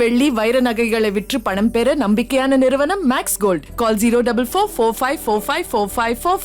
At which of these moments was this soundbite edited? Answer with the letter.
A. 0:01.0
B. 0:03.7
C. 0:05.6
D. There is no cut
D